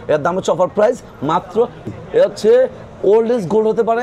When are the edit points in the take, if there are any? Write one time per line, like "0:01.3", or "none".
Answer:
0:01.9